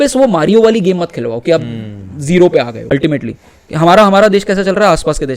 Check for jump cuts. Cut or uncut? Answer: cut